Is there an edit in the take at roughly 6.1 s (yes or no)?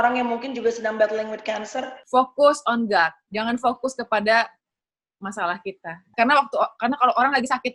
yes